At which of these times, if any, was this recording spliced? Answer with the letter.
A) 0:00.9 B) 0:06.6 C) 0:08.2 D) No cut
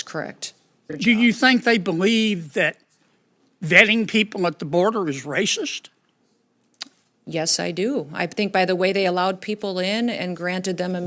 A